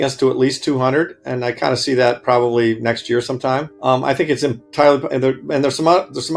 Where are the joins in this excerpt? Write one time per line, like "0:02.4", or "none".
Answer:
0:03.7